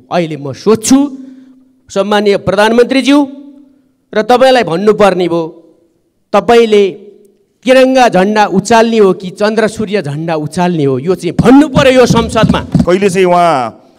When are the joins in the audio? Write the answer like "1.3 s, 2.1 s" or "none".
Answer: 12.8 s

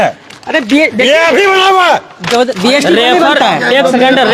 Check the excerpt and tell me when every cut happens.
none

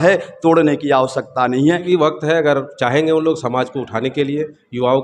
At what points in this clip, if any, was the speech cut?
1.9 s

